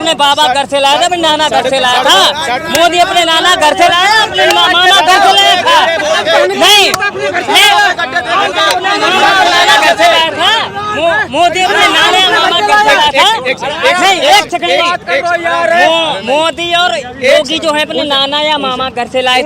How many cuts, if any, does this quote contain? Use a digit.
0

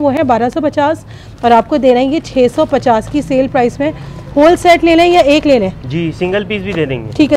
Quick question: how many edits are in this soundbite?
0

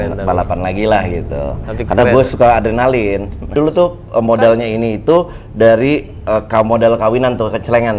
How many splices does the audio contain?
1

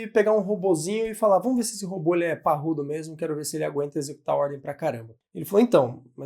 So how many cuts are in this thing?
1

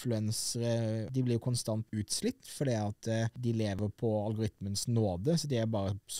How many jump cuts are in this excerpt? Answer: 3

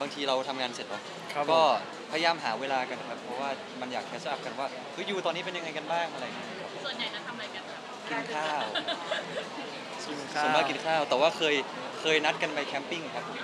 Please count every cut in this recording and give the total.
0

